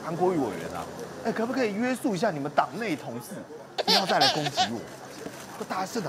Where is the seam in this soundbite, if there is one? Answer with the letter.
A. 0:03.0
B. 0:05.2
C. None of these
C